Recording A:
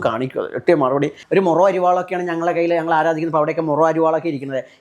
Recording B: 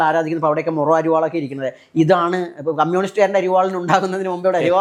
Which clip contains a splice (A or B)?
A